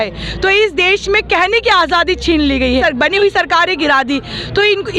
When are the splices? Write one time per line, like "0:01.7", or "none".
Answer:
0:02.8